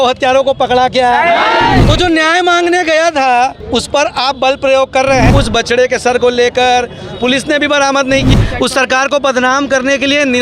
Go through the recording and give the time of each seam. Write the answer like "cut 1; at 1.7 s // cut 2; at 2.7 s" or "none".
cut 1; at 1.8 s // cut 2; at 5.3 s // cut 3; at 8.3 s